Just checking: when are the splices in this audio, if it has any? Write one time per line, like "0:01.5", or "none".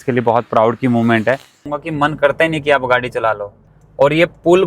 0:01.8
0:03.8